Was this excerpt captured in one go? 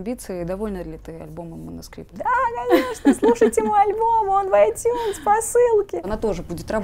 no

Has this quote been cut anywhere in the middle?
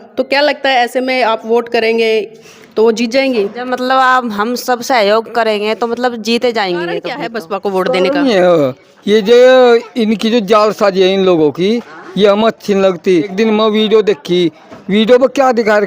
yes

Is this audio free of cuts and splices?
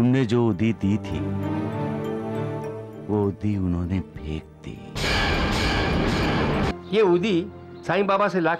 no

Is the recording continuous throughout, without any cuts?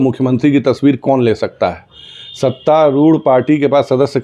no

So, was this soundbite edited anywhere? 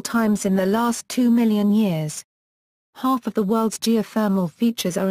no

